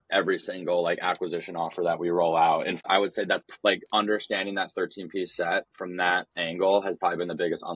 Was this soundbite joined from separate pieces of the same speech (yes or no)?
no